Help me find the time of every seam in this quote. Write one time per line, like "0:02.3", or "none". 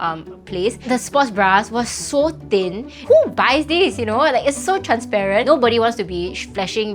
0:00.9
0:03.0
0:05.4